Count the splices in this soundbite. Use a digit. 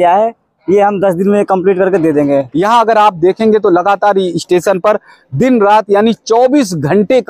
1